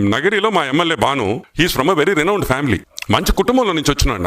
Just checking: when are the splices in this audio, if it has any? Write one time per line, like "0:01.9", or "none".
0:01.4
0:02.9